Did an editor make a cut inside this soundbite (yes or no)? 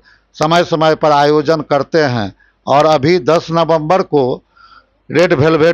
no